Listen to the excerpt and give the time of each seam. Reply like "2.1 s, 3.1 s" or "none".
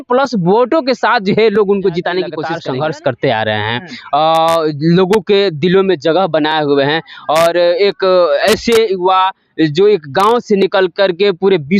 2.5 s